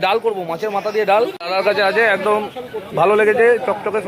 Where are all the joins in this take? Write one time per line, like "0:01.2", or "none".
0:01.5